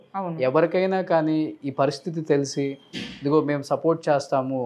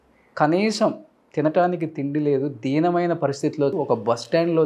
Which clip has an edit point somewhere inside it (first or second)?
second